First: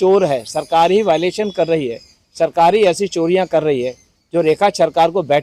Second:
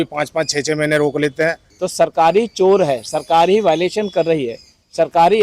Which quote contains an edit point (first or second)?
second